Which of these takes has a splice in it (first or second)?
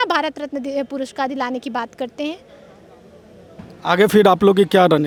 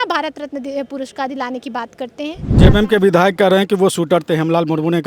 second